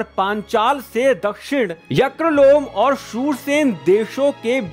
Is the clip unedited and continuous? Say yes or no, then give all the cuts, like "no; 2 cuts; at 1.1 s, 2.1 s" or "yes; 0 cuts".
yes; 0 cuts